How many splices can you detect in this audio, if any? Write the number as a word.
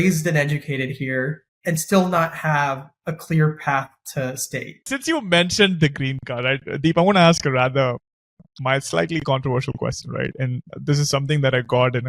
two